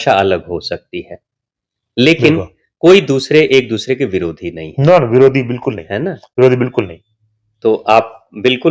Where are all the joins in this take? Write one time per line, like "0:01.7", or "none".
none